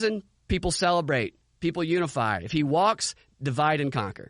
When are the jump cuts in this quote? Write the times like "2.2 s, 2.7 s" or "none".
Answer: none